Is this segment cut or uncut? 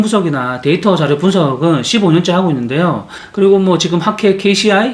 uncut